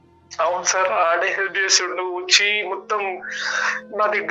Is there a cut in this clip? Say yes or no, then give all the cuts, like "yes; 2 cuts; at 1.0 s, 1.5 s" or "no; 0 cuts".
no; 0 cuts